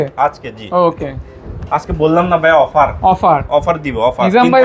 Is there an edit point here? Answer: no; 0 cuts

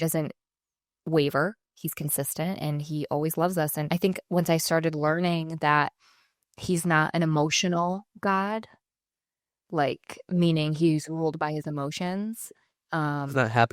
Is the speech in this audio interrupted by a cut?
no; 0 cuts

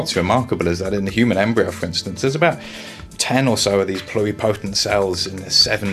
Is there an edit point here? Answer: no; 0 cuts

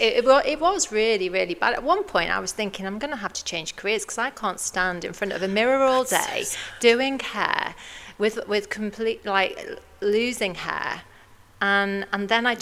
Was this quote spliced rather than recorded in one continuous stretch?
no; 0 cuts

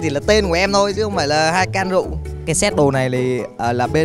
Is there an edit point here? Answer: yes; 1 cut; at 2.2 s

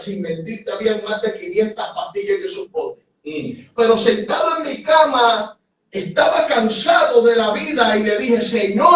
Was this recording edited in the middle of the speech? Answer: no; 0 cuts

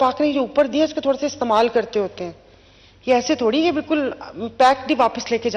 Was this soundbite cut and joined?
no; 0 cuts

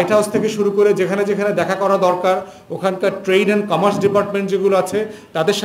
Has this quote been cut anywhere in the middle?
no; 0 cuts

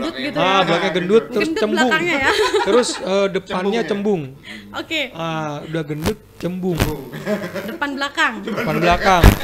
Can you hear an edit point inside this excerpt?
no; 0 cuts

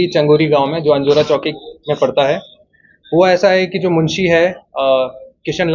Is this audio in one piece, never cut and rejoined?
yes; 0 cuts

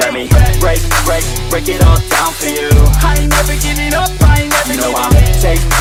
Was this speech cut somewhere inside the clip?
no; 0 cuts

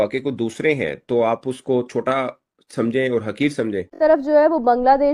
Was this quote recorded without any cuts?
no; 1 cut; at 3.9 s

